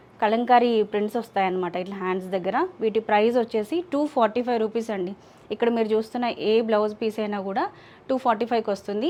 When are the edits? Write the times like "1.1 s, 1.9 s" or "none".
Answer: none